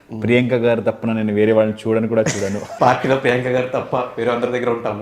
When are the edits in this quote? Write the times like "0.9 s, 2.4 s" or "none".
2.6 s